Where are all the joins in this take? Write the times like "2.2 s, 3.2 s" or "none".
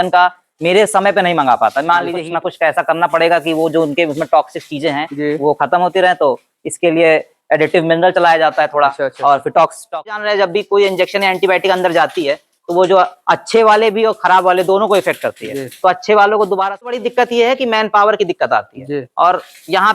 2.2 s, 10.1 s, 16.9 s